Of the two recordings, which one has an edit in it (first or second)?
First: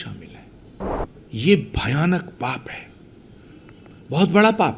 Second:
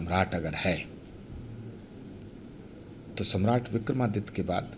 first